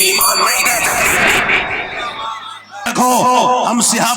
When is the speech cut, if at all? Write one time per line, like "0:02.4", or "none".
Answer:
0:02.9